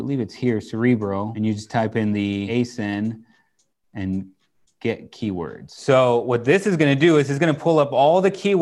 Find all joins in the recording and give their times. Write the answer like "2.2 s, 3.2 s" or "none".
1.3 s, 2.5 s, 5.7 s